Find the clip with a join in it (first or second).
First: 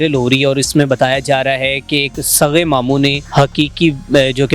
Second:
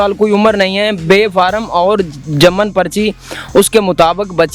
first